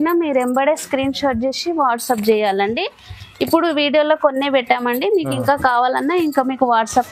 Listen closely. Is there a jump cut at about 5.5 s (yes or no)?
no